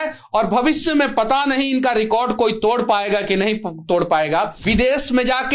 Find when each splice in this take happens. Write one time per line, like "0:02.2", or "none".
0:04.6

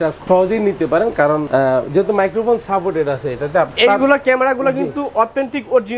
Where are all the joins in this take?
0:03.7

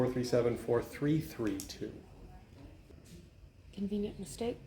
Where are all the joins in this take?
0:02.9

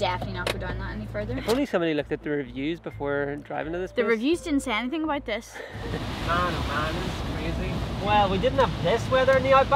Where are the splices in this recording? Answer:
0:01.4
0:05.9
0:08.0

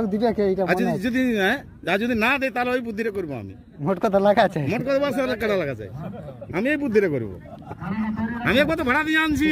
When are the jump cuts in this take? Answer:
none

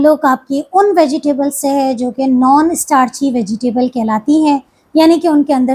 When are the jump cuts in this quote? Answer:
none

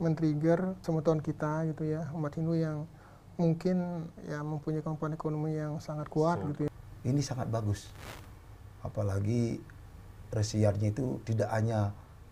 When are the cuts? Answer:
0:00.8
0:04.1
0:06.7

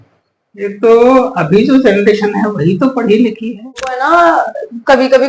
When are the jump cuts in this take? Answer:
0:04.0

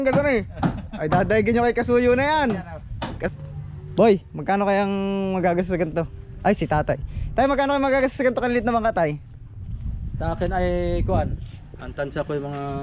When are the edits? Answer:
0:03.3

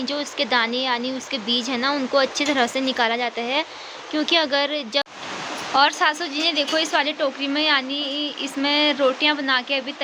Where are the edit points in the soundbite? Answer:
0:05.1

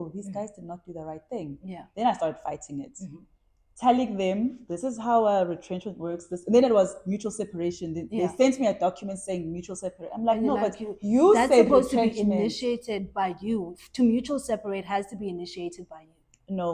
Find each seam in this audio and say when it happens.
none

